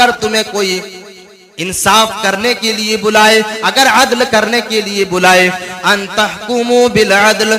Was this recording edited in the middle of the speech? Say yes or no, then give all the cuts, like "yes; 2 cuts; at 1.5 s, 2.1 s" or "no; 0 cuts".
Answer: yes; 1 cut; at 5.7 s